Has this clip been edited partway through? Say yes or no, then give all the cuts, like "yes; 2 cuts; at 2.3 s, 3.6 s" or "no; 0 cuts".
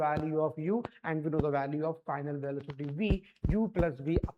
no; 0 cuts